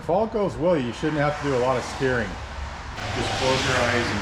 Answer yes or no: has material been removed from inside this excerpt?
yes